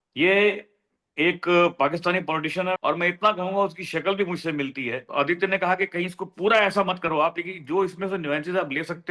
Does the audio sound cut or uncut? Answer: cut